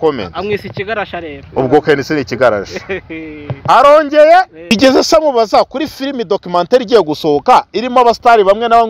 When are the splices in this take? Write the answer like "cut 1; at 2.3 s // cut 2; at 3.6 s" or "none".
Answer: cut 1; at 4.7 s